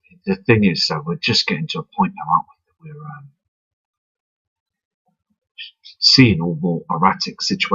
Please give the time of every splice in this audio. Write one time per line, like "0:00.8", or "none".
none